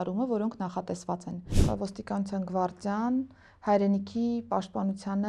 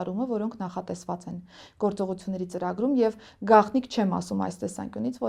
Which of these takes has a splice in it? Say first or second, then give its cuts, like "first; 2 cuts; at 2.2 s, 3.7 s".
first; 1 cut; at 1.5 s